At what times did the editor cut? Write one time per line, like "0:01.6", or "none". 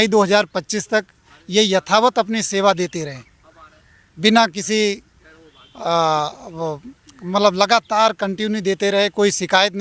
none